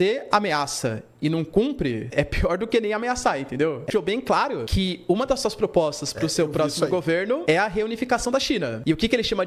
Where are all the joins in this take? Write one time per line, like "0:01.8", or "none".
0:03.9

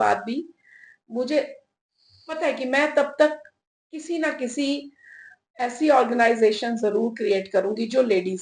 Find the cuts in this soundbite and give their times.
none

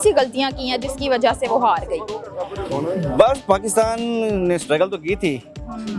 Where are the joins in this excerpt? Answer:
none

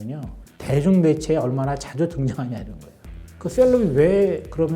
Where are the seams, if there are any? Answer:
0:03.3

